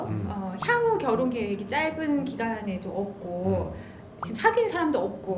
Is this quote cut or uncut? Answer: uncut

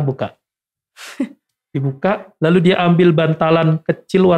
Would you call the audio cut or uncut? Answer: uncut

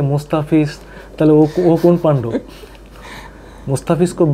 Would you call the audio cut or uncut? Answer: uncut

